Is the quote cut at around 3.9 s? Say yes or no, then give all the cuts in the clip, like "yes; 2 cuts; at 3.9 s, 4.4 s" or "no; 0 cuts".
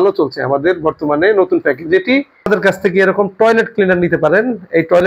no; 1 cut; at 2.5 s